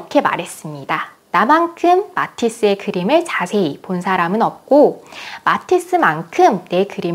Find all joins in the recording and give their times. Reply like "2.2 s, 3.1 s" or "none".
none